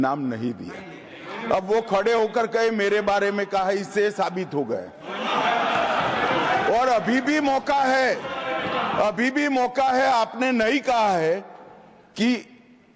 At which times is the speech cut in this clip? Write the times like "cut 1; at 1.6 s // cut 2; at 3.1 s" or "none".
none